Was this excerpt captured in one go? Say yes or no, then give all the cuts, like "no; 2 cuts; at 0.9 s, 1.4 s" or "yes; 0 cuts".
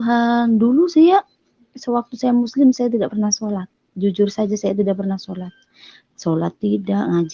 yes; 0 cuts